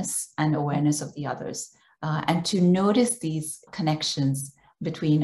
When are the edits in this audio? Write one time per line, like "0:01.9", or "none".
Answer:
0:03.7